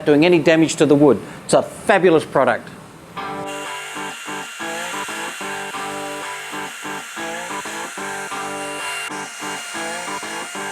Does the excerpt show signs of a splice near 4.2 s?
no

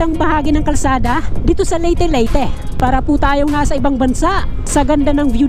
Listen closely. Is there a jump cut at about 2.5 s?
no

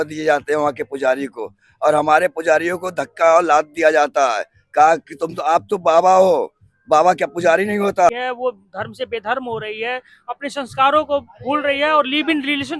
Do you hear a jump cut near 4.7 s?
no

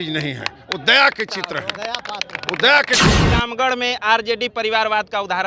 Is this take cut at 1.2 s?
no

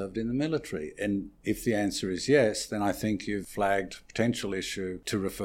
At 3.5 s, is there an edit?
yes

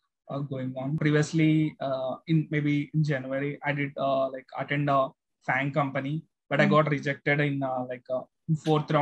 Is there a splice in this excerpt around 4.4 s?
no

